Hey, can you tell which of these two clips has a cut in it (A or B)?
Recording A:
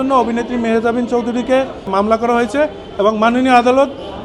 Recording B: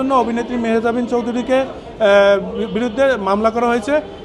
A